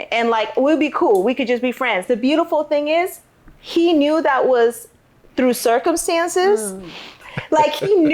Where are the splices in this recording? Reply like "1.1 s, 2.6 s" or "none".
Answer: 2.0 s, 7.2 s